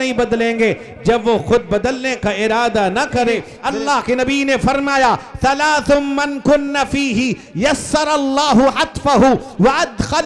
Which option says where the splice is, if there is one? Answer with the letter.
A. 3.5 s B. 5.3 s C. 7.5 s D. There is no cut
A